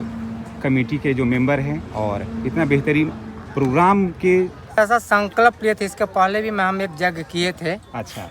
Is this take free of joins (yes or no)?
no